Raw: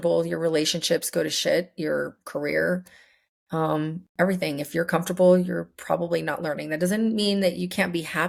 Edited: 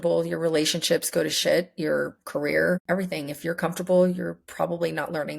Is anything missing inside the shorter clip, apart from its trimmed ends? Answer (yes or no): yes